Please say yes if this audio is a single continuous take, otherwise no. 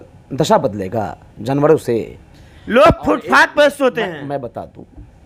yes